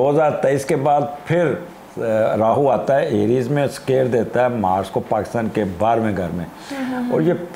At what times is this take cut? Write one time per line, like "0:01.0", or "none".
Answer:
none